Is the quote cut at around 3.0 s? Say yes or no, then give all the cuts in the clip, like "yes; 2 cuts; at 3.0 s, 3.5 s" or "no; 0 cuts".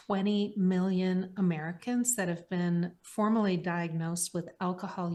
no; 0 cuts